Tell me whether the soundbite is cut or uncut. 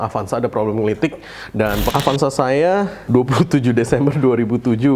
cut